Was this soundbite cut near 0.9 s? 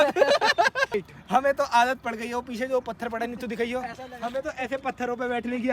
yes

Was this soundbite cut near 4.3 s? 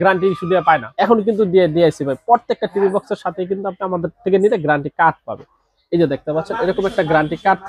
no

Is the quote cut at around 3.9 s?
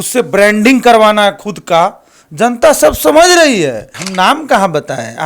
yes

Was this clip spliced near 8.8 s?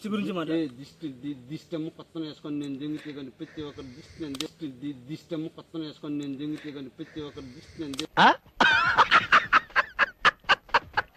no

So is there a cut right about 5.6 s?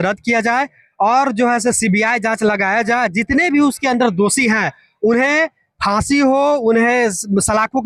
no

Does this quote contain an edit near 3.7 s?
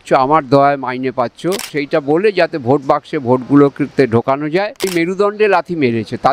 no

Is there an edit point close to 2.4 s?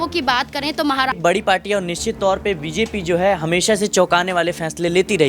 no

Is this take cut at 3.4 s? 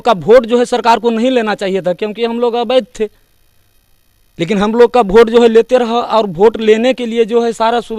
no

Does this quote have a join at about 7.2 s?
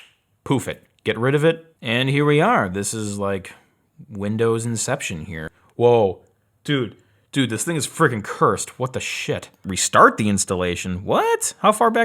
no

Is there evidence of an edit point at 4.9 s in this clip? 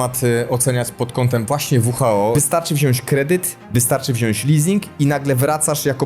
no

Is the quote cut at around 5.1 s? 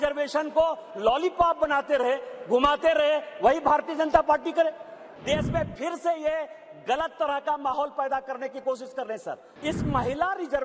yes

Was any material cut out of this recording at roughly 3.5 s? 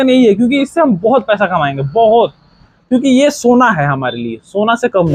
no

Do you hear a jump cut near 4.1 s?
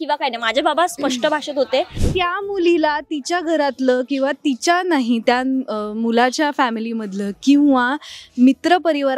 no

